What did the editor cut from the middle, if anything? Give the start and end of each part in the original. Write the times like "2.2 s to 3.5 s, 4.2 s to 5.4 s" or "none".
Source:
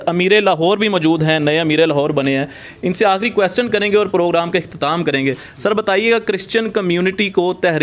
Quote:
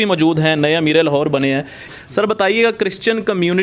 2.8 s to 5.4 s